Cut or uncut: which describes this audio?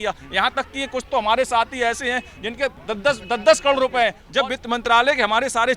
cut